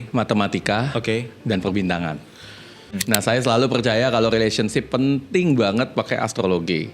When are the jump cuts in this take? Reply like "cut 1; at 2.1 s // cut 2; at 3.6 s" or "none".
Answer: cut 1; at 3.0 s